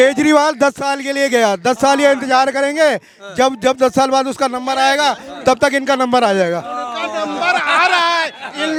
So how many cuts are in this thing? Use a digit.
0